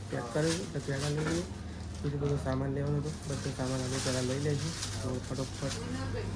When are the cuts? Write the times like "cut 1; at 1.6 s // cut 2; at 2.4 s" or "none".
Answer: none